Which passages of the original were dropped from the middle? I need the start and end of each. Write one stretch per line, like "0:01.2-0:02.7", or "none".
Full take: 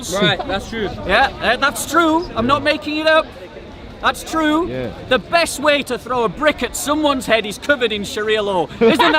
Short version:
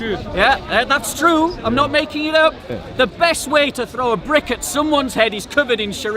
0:03.5-0:04.9

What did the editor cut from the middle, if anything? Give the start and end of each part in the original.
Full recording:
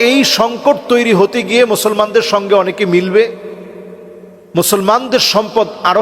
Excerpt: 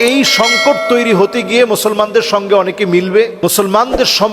0:03.3-0:04.5

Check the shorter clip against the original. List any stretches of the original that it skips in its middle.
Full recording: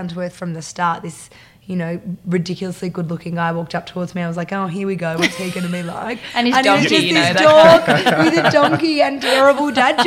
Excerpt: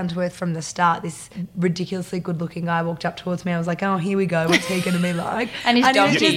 0:01.4-0:02.1

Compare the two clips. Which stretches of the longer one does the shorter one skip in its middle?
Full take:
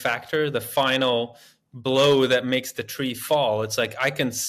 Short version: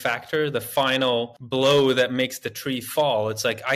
0:01.4-0:01.7

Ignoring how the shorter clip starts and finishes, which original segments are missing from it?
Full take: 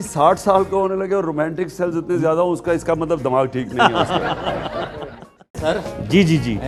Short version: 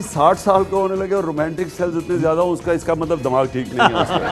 none

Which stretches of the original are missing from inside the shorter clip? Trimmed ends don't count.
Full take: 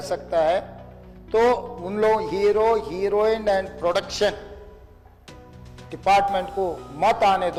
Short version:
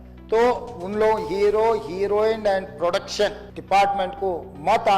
0:04.5-0:05.8

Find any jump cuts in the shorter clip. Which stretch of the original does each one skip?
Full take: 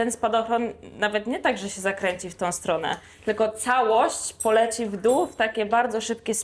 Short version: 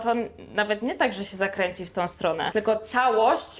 0:02.9-0:03.2

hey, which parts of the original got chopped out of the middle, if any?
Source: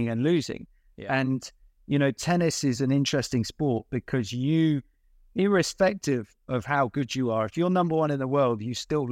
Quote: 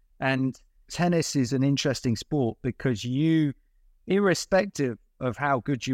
0:01.8-0:02.2

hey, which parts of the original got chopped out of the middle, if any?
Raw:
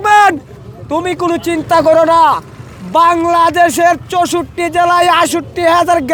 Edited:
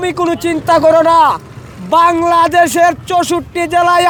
none

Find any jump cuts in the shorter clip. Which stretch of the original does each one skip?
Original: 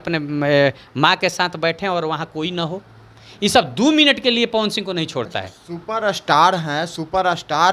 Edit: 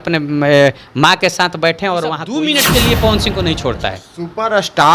0:02.4-0:03.9

